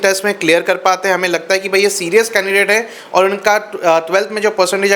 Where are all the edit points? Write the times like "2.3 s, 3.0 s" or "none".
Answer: none